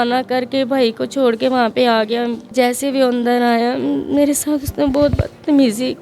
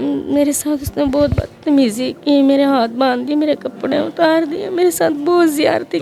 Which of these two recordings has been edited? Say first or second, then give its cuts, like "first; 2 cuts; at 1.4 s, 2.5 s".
first; 1 cut; at 2.5 s